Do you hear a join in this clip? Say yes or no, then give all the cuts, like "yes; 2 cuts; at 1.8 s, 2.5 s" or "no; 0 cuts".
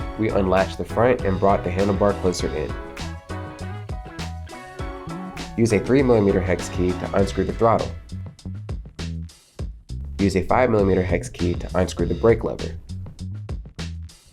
yes; 5 cuts; at 2.7 s, 5.5 s, 7.9 s, 9.7 s, 12.6 s